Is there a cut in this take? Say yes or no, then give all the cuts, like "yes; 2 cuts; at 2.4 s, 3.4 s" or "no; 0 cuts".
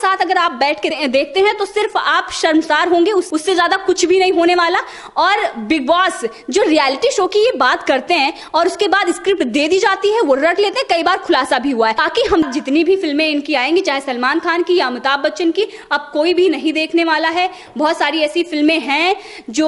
yes; 1 cut; at 12.4 s